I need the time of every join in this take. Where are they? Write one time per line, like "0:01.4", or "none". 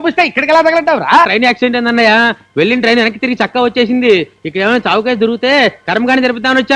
0:01.3